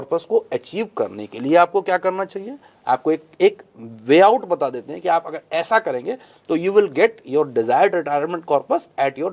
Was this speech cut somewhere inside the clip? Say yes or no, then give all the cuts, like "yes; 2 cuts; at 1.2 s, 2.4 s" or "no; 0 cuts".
no; 0 cuts